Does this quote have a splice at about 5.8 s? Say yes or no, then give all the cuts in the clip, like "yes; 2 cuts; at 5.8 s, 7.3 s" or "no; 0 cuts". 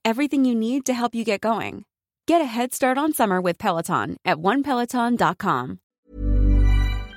yes; 1 cut; at 5.8 s